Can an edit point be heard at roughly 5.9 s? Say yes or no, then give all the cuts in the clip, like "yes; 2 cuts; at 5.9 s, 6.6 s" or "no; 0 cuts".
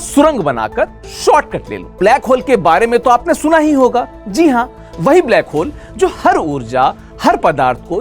no; 1 cut; at 1.9 s